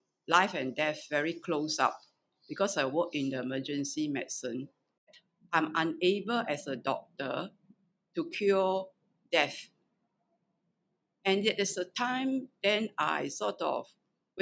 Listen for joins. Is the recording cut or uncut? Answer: cut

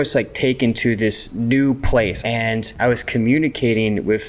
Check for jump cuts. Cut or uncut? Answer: cut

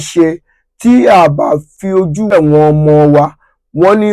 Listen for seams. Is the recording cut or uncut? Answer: cut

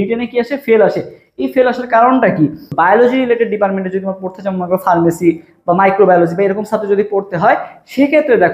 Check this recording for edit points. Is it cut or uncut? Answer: cut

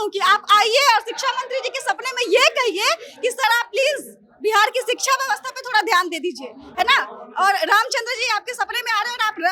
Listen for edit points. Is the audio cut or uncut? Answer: uncut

